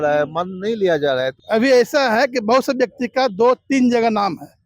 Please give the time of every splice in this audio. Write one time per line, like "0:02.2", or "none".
0:01.4